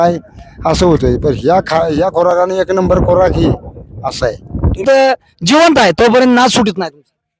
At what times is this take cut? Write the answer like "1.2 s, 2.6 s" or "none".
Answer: 4.8 s